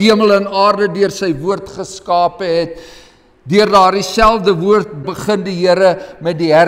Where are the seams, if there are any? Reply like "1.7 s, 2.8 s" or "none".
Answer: 5.0 s

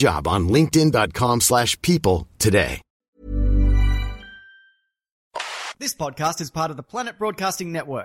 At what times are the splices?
2.9 s, 5.2 s

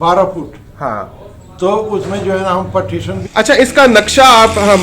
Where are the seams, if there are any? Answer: 3.2 s

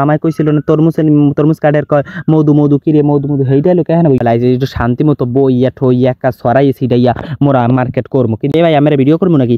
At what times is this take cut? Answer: 4.2 s, 8.5 s

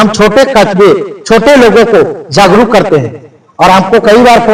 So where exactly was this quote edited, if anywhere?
none

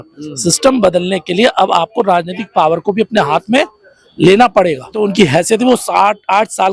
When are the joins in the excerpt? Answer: 5.0 s

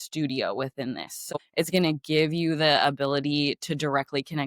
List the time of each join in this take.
1.3 s

